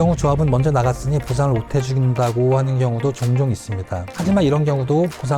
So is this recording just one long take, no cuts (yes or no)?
yes